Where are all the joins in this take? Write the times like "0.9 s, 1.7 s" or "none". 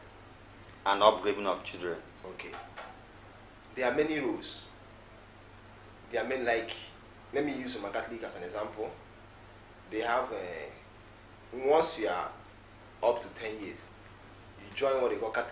none